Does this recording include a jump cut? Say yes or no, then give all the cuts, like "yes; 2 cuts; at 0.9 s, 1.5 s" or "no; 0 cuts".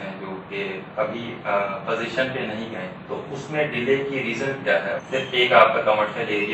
yes; 1 cut; at 5.0 s